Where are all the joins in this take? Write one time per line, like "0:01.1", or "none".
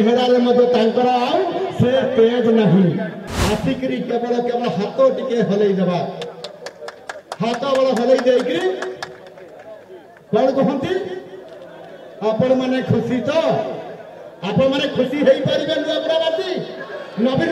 0:03.1

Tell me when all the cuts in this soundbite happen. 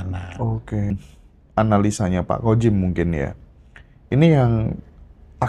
0:00.9

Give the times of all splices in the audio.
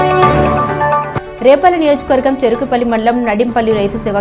0:01.2

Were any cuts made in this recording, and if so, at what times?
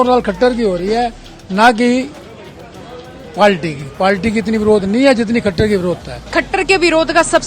0:06.1

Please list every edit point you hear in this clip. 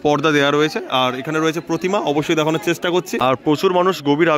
0:03.1

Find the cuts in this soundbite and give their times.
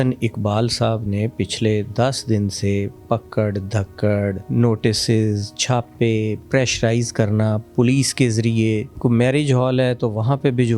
0:04.4
0:06.4
0:07.6
0:08.9

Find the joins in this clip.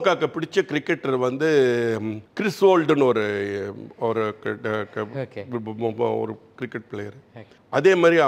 none

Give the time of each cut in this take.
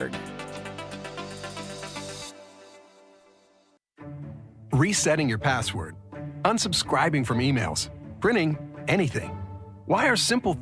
0:04.0

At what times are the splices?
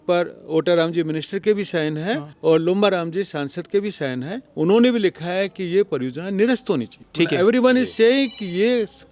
0:02.3
0:04.4
0:07.0

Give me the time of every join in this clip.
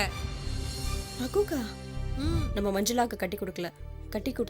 0:02.4

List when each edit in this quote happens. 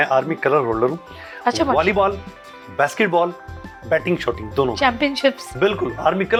none

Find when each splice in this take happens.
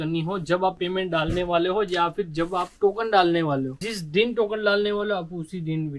none

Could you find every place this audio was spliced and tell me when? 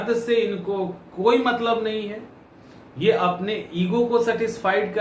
none

